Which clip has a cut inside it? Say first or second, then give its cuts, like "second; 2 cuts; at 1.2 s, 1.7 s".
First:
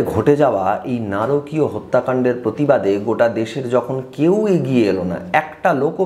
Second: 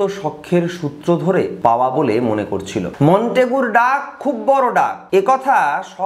second; 3 cuts; at 1.5 s, 2.9 s, 5.0 s